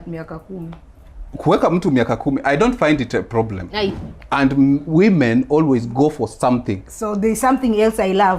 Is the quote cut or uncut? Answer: cut